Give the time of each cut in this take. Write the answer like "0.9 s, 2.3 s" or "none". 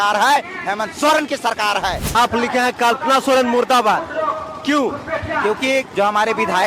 2.1 s, 5.9 s